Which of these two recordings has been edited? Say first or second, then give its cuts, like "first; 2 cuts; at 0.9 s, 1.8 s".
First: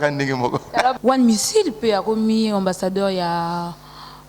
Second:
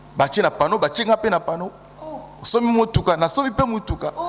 first; 1 cut; at 0.9 s